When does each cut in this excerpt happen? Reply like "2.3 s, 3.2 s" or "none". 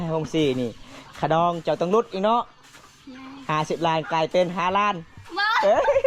none